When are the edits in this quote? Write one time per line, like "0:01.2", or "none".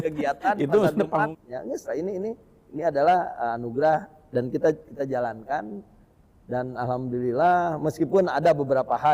0:01.3